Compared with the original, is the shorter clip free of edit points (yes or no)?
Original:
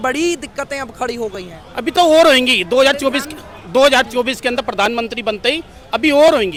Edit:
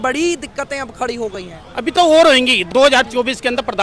no